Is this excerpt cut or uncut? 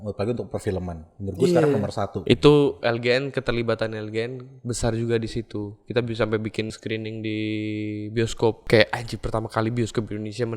cut